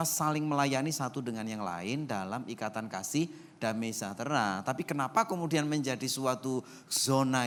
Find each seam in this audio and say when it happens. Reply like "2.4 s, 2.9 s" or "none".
none